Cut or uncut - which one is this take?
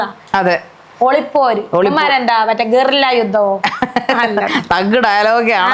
uncut